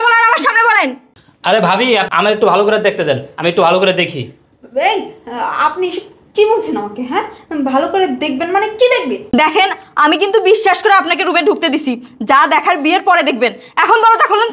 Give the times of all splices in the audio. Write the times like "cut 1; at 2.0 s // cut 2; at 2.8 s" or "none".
cut 1; at 2.1 s